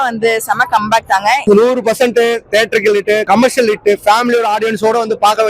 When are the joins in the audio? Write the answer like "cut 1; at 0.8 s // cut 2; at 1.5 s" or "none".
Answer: cut 1; at 1.4 s // cut 2; at 3.2 s